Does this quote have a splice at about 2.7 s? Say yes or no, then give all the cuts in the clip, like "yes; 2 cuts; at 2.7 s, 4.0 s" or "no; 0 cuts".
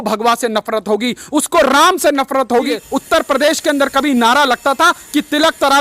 yes; 1 cut; at 2.7 s